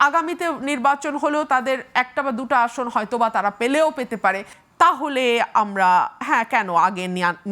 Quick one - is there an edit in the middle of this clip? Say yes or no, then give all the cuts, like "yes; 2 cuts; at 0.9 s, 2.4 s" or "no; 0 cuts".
yes; 1 cut; at 4.6 s